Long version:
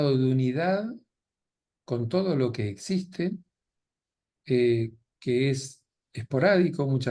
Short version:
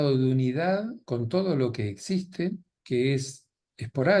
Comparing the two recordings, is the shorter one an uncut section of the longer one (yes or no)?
no